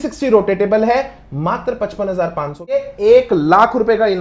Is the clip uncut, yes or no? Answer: no